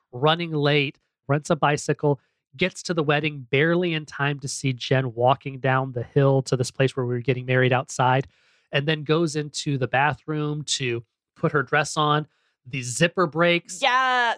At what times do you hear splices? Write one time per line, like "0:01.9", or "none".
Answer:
0:01.3